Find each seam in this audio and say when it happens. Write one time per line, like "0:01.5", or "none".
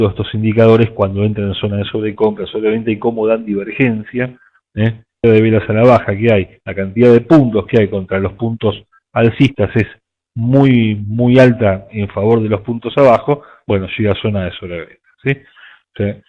none